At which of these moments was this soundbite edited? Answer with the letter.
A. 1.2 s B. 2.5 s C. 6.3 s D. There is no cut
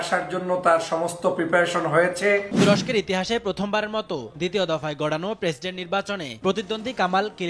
B